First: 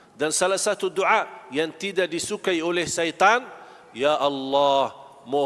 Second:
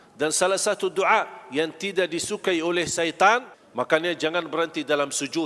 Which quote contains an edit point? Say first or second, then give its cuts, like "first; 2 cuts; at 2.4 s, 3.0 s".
second; 1 cut; at 3.6 s